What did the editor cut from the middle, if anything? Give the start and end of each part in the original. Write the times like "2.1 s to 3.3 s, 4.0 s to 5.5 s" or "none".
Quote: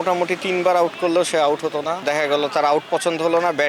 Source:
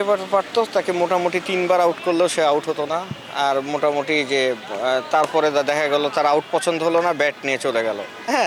3.1 s to 5.7 s